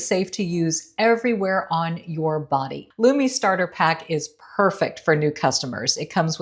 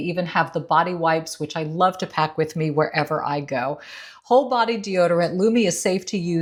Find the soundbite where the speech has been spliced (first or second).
first